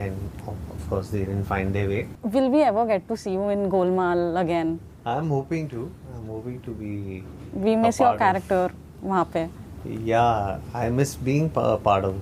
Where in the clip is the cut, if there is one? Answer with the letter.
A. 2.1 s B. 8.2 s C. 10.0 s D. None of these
A